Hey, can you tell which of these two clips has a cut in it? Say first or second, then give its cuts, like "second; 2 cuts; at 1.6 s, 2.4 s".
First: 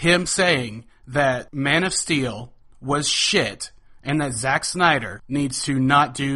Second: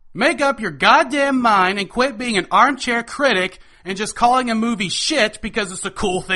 first; 2 cuts; at 1.5 s, 5.2 s